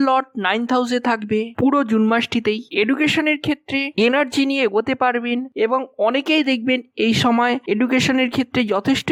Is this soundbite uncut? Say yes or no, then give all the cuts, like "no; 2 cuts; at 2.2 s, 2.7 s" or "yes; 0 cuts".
yes; 0 cuts